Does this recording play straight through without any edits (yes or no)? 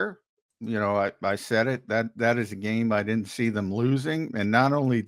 yes